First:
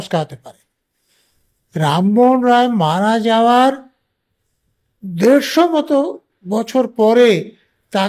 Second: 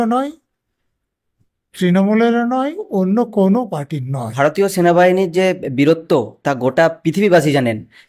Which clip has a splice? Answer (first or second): second